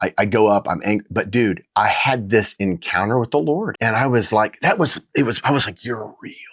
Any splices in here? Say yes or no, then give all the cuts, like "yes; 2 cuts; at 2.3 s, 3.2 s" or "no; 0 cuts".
yes; 1 cut; at 3.7 s